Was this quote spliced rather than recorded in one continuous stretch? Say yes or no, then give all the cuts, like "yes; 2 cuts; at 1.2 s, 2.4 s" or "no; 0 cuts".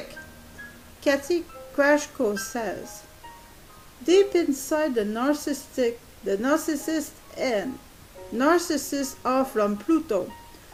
no; 0 cuts